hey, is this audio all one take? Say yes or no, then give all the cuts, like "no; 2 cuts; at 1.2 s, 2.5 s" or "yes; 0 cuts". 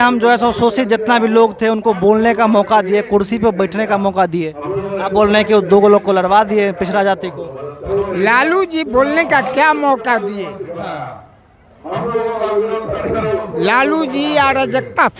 yes; 0 cuts